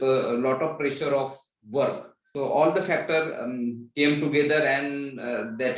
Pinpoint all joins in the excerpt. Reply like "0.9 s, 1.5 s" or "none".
2.3 s